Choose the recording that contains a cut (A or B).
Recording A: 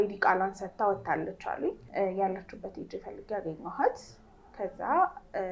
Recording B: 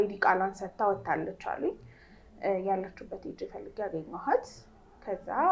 A